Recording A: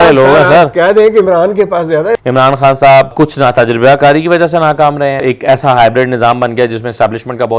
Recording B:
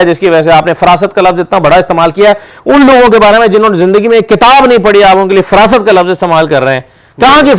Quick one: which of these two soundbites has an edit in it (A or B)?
A